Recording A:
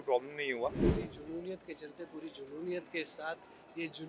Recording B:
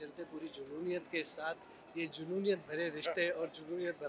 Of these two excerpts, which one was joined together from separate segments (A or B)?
A